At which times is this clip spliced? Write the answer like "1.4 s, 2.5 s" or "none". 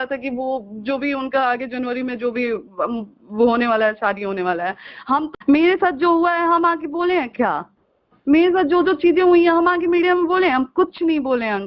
5.3 s